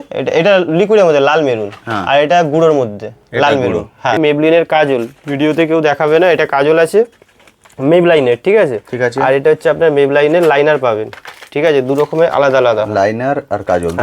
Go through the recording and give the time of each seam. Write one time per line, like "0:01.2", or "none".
0:04.2